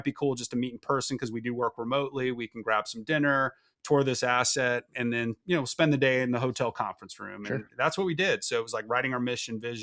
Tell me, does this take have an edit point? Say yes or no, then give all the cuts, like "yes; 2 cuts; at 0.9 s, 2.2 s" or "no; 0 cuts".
no; 0 cuts